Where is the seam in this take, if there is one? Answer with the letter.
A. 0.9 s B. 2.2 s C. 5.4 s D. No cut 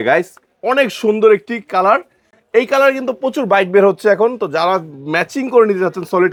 D